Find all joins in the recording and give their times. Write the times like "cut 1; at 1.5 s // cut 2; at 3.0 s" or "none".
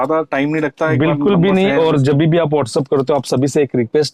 none